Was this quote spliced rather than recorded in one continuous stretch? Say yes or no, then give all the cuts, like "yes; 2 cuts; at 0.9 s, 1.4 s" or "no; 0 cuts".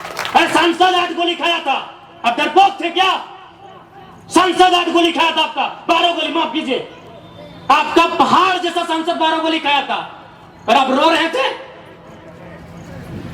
no; 0 cuts